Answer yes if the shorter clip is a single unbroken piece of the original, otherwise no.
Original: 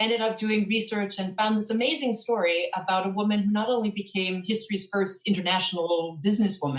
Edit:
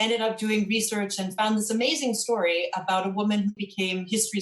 no